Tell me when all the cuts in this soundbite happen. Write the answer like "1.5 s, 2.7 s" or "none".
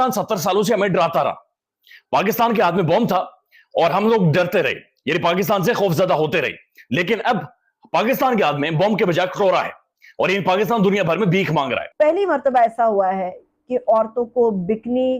11.8 s